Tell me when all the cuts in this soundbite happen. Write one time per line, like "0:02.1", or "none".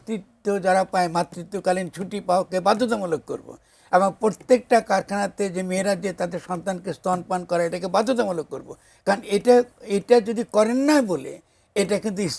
none